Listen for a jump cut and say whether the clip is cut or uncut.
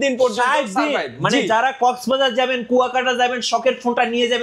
uncut